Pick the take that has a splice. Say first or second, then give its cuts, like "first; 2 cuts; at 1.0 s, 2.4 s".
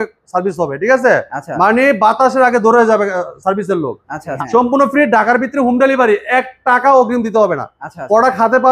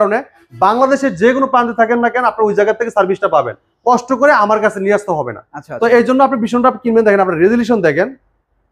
first; 1 cut; at 4.3 s